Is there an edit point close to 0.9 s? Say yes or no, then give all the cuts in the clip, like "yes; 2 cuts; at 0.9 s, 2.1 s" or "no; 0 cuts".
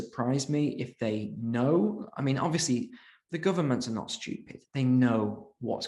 no; 0 cuts